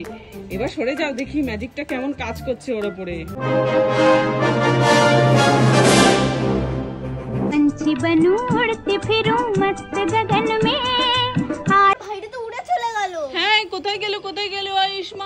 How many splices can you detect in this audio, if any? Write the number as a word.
two